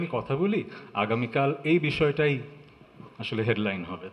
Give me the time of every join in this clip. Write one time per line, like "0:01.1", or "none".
none